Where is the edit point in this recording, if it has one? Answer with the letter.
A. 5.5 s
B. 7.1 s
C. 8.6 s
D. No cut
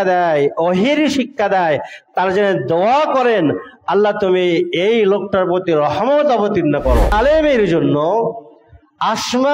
B